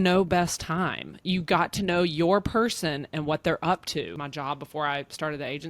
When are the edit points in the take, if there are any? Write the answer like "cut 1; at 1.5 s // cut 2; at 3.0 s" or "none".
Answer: cut 1; at 4.2 s